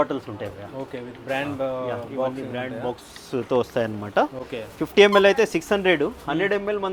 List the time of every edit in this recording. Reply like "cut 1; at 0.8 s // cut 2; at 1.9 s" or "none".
none